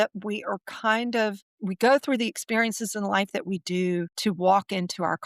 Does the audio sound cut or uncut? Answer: cut